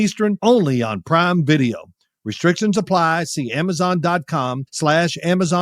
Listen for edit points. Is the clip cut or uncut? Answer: cut